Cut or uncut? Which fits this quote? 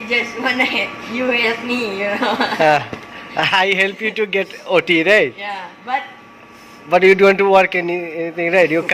uncut